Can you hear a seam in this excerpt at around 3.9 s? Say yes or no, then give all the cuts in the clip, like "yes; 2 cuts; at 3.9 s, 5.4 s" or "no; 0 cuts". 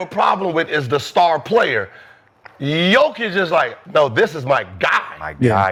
no; 0 cuts